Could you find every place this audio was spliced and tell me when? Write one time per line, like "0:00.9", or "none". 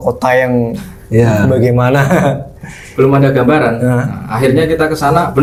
none